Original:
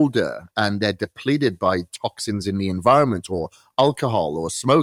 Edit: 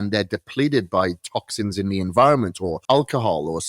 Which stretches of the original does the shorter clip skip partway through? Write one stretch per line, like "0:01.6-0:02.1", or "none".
0:03.4-0:03.6